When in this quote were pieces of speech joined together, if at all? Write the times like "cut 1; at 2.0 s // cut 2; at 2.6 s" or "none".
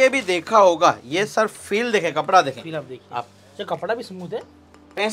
none